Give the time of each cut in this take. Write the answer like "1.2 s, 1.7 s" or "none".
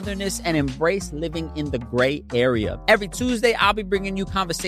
2.8 s